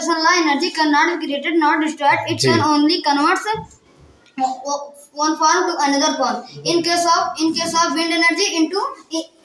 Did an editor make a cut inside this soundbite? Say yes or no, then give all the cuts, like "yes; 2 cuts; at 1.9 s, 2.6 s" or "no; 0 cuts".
no; 0 cuts